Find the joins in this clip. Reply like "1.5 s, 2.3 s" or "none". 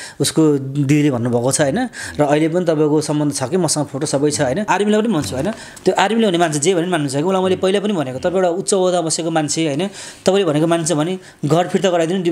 4.7 s